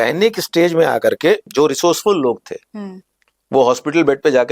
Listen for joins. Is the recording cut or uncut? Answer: uncut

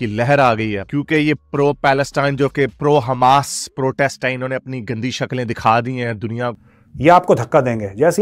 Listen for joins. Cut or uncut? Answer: cut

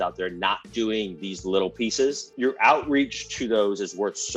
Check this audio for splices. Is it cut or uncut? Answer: cut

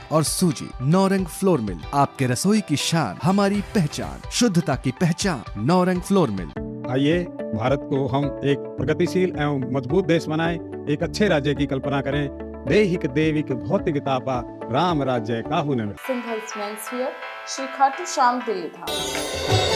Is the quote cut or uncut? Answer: cut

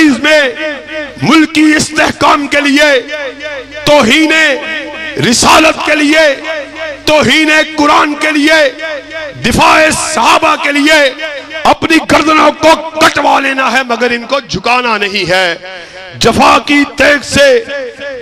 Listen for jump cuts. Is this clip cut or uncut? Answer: uncut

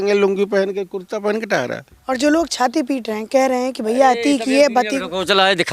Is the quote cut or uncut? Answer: cut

